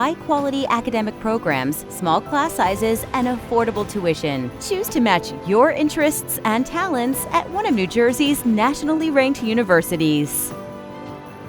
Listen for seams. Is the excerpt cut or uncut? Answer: cut